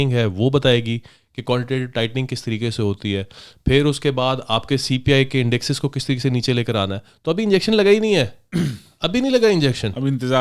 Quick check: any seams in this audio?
no; 0 cuts

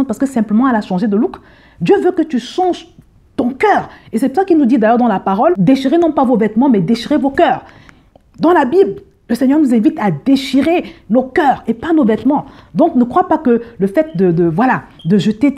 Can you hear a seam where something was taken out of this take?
no; 0 cuts

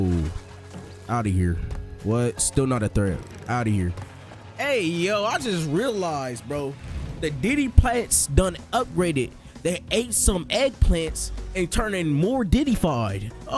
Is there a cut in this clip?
no; 0 cuts

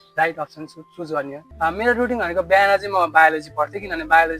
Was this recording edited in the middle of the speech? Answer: yes; 1 cut; at 1.4 s

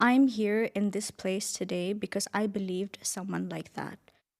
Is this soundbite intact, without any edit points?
yes; 0 cuts

